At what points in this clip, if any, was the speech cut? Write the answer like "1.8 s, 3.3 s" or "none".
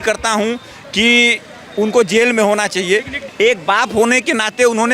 3.2 s